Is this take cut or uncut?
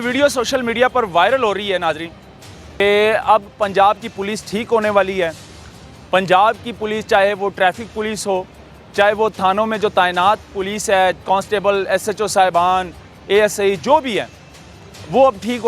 cut